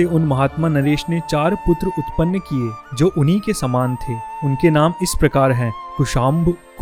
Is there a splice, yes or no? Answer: no